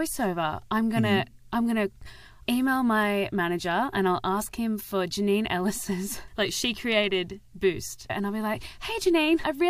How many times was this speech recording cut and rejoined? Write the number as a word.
three